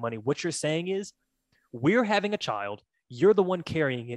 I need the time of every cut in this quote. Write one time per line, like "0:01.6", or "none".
none